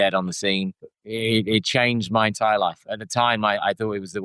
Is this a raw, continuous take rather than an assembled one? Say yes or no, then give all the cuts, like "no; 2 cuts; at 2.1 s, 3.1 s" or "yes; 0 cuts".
no; 1 cut; at 1.0 s